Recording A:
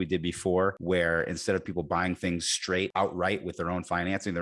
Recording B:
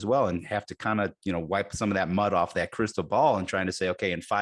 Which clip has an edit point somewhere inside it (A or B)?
A